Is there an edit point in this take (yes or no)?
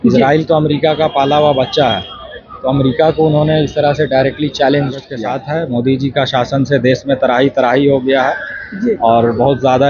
yes